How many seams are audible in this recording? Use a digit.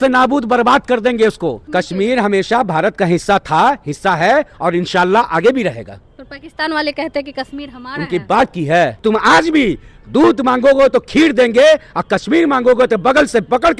2